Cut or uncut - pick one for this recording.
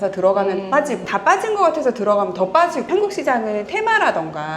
cut